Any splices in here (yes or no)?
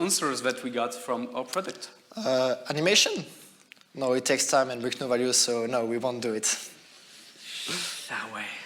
no